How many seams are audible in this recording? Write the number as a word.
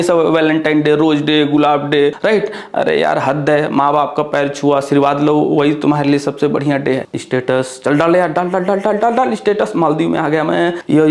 one